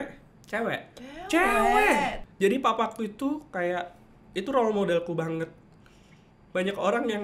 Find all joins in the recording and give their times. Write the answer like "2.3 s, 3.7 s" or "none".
2.2 s